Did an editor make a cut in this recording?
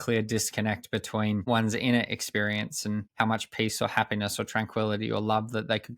yes; 2 cuts; at 1.4 s, 3.1 s

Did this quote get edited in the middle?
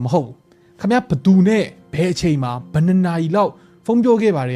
no; 0 cuts

